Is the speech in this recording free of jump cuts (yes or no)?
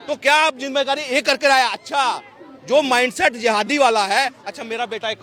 yes